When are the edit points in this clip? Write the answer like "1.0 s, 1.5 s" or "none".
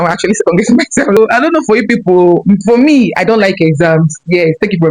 1.2 s